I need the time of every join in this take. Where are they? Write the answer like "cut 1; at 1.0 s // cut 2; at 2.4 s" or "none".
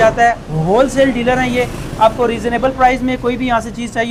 none